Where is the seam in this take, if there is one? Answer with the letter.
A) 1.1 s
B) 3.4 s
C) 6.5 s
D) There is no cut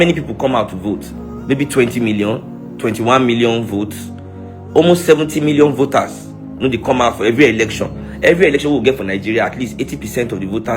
A